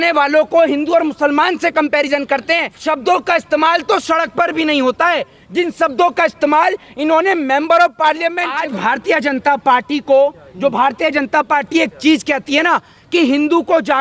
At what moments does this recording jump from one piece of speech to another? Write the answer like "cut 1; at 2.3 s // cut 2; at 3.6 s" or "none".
cut 1; at 2.7 s // cut 2; at 8.5 s